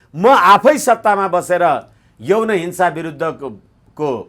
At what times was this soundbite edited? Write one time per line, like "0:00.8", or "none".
none